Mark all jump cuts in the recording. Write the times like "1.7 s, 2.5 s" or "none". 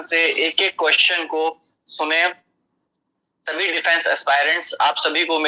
none